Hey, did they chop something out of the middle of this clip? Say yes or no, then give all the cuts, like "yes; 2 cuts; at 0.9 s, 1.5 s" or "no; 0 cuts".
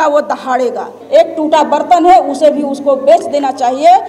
yes; 1 cut; at 0.9 s